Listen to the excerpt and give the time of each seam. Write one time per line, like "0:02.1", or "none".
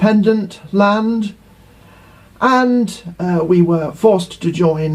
0:02.3